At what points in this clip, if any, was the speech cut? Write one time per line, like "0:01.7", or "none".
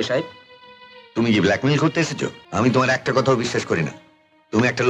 0:02.4